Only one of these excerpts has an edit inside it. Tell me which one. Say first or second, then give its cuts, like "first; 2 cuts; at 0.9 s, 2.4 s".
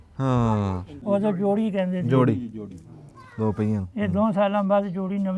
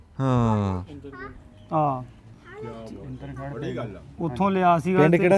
first; 1 cut; at 0.9 s